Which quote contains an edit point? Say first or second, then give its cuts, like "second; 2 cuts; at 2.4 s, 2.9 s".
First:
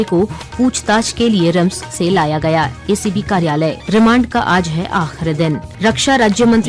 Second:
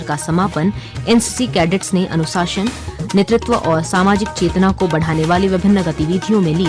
first; 2 cuts; at 3.8 s, 5.7 s